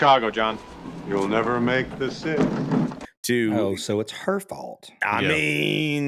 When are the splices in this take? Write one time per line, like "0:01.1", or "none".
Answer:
none